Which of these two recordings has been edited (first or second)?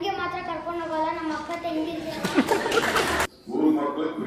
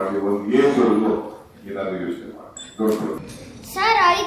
second